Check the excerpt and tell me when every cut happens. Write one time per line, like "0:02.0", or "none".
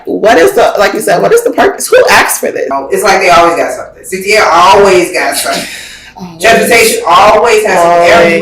0:02.7